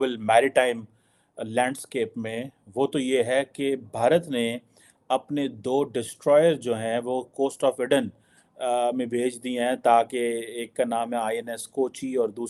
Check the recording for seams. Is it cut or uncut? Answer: uncut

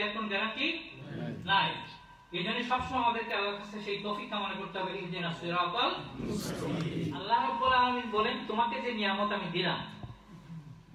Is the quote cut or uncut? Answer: cut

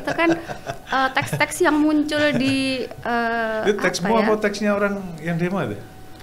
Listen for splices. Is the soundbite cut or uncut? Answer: uncut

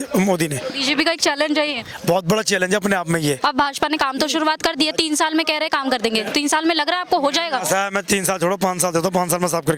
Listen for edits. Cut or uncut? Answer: cut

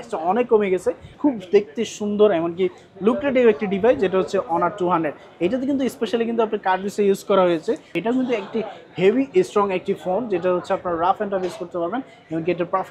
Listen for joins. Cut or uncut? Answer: cut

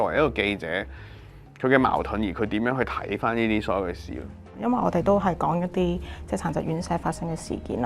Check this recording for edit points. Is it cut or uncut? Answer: cut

